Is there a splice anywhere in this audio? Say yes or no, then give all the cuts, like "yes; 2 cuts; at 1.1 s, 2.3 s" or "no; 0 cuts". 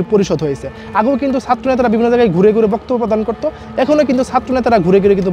no; 0 cuts